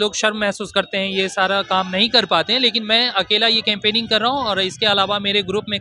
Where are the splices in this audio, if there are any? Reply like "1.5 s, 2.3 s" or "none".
none

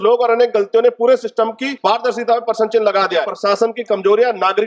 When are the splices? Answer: 1.6 s, 3.3 s

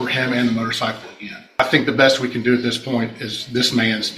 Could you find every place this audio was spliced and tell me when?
1.6 s

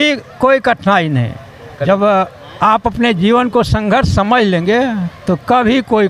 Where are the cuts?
none

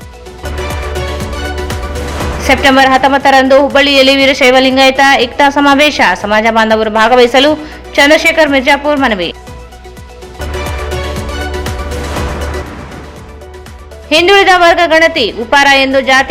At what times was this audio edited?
2.3 s

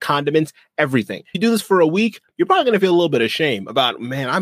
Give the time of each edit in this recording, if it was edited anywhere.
1.3 s

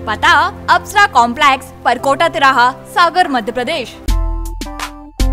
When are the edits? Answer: 4.0 s

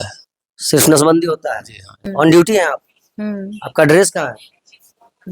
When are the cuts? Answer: 1.9 s

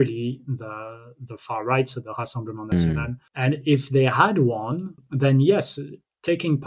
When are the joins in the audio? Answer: 3.2 s, 5.0 s

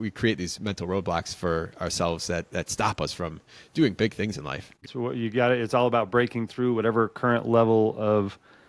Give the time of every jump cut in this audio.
4.8 s

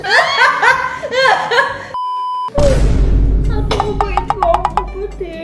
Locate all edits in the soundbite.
2.5 s

